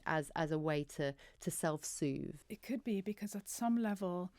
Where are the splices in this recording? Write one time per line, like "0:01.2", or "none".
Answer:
0:02.4